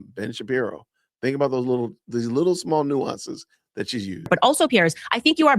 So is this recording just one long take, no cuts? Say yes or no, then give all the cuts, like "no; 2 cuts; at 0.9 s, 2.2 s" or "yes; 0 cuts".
no; 1 cut; at 4.3 s